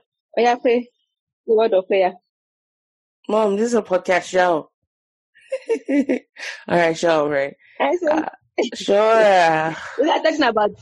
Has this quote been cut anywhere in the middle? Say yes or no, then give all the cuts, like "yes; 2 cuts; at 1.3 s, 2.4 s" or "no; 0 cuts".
no; 0 cuts